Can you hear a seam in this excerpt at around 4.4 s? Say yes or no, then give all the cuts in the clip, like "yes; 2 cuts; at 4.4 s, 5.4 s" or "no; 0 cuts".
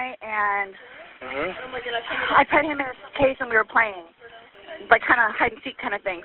yes; 1 cut; at 4.4 s